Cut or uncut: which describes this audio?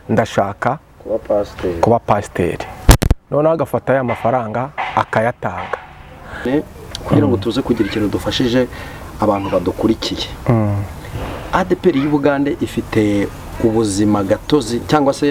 cut